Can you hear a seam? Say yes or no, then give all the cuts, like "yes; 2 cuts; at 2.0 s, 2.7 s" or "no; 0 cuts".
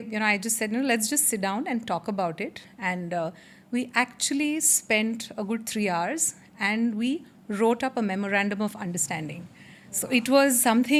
no; 0 cuts